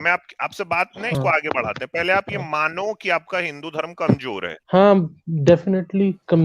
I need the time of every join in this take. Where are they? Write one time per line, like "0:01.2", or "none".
0:04.5